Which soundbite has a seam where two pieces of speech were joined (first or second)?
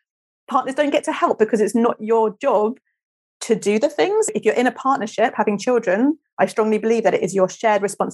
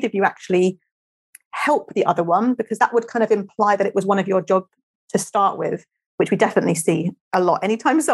first